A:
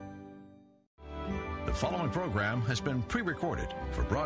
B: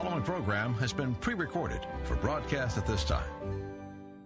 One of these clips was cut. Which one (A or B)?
A